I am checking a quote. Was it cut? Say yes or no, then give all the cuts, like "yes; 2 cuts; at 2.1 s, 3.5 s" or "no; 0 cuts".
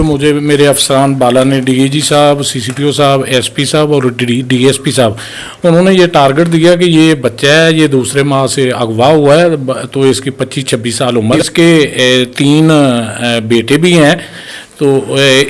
no; 0 cuts